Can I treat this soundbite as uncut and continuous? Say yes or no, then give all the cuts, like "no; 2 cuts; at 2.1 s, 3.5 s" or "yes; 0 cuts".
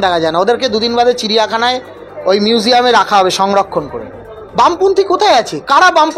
yes; 0 cuts